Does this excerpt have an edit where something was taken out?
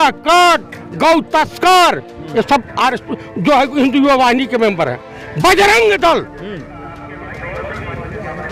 no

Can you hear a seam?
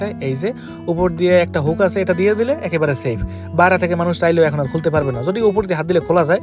no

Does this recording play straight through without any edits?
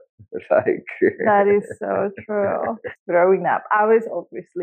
no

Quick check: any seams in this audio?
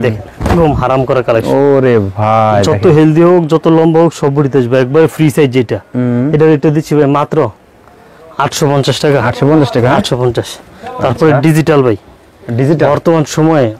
no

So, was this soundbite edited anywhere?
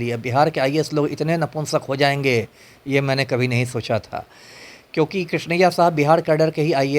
no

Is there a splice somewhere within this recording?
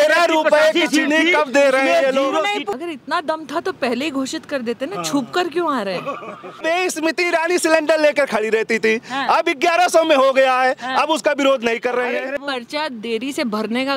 yes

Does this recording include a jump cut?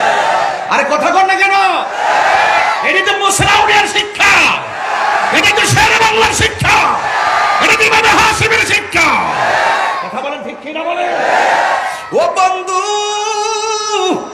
yes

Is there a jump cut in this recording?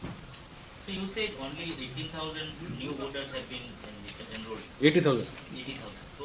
yes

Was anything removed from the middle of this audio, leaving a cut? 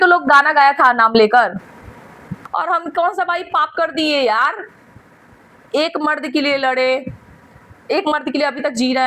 yes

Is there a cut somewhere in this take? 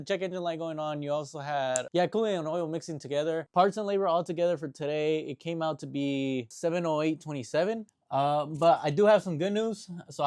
yes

